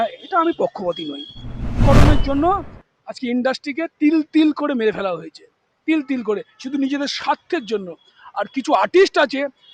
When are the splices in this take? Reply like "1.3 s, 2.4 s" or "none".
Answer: 1.8 s